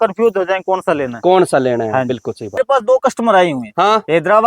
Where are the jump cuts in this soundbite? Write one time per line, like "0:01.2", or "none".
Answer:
0:02.6